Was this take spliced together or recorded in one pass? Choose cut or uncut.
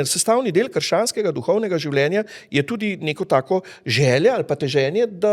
uncut